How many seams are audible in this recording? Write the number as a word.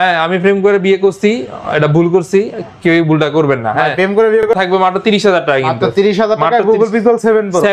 one